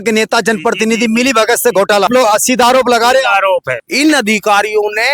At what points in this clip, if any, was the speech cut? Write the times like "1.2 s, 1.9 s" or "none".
2.1 s, 3.8 s